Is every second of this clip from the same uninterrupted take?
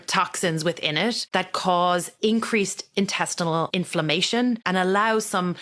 no; 4 cuts; at 1.2 s, 2.1 s, 3.7 s, 4.6 s

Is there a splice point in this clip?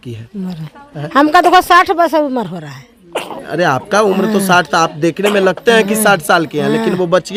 no; 0 cuts

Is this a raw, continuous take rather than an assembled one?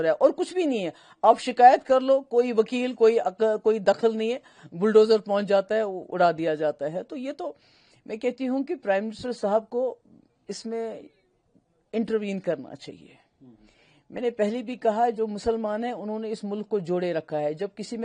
yes; 0 cuts

